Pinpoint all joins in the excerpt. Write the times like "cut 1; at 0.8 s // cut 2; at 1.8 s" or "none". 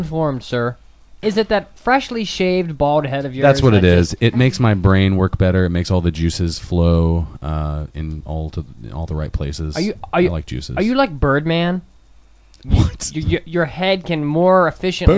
cut 1; at 1.2 s